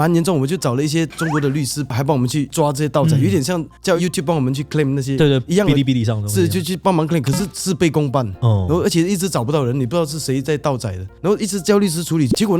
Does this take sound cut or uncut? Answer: cut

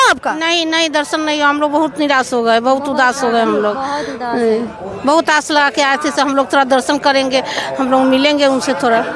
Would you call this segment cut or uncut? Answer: uncut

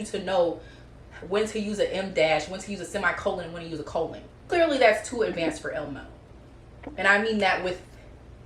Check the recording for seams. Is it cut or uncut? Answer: cut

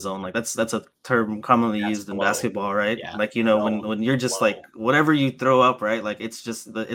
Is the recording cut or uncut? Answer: uncut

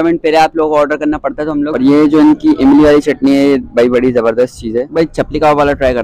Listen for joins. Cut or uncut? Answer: cut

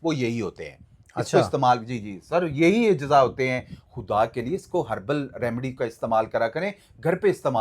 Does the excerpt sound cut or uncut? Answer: cut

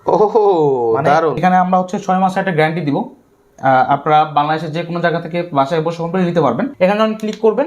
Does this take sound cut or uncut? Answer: cut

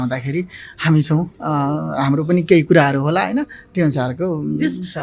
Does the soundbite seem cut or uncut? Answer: uncut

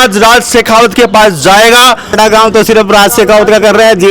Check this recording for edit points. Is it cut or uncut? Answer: cut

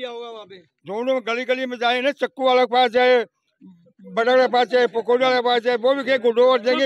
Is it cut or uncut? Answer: uncut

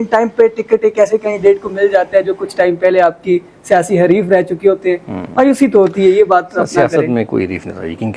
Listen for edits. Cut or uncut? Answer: uncut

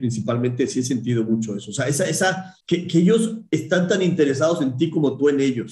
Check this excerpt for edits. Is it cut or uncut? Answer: cut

